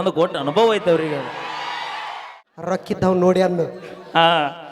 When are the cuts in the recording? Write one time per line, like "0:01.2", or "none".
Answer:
0:02.4

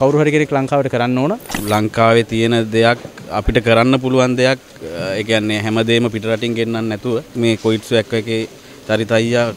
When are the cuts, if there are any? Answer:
0:01.6
0:07.4

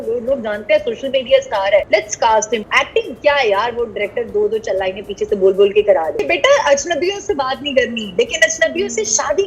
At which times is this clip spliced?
0:01.9
0:02.7
0:06.2

